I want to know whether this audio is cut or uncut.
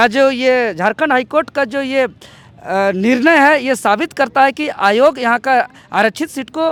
uncut